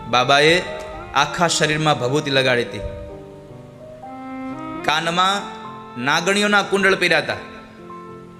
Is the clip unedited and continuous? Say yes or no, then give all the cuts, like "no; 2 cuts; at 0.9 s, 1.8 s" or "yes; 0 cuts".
yes; 0 cuts